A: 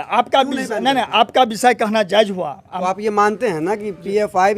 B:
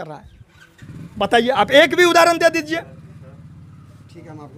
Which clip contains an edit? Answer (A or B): A